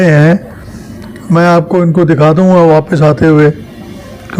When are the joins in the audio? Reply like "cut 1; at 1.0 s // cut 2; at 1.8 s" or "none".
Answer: none

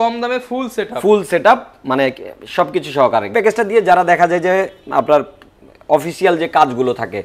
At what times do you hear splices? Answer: cut 1; at 3.3 s

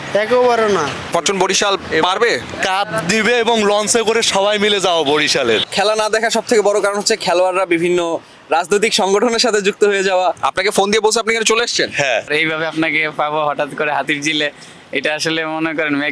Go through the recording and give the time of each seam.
cut 1; at 1.1 s // cut 2; at 5.7 s // cut 3; at 10.4 s // cut 4; at 12.3 s

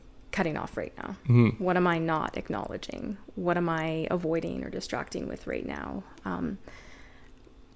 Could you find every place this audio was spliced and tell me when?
none

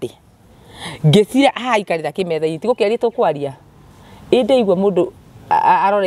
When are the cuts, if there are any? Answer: none

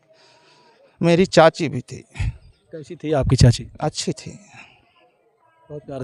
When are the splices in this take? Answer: none

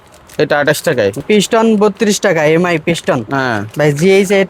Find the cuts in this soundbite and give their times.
cut 1; at 1.2 s

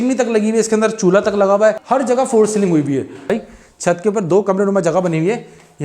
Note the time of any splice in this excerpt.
cut 1; at 1.8 s // cut 2; at 3.3 s

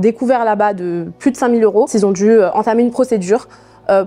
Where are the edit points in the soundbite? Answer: none

